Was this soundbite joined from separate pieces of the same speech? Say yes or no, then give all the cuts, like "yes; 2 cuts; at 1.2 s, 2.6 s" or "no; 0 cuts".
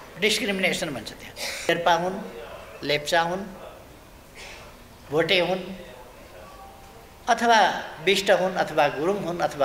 yes; 1 cut; at 1.7 s